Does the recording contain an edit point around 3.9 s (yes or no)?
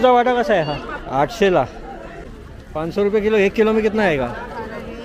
no